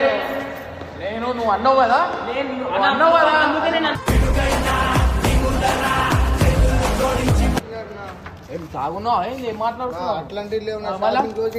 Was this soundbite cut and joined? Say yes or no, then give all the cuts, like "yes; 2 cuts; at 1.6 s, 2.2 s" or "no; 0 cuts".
yes; 1 cut; at 7.6 s